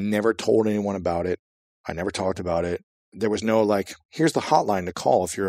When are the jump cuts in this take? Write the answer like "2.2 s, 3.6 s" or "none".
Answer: 3.0 s